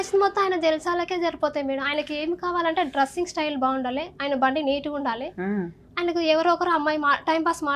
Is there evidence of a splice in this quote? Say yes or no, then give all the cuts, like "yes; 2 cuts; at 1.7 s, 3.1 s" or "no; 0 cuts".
no; 0 cuts